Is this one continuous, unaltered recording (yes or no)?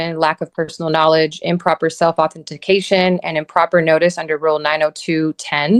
yes